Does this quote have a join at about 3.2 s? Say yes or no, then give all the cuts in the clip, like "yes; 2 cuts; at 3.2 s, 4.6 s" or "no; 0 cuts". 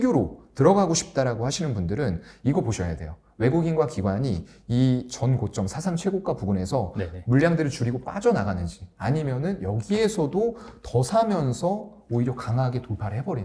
no; 0 cuts